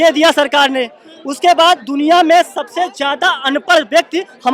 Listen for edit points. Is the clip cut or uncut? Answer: uncut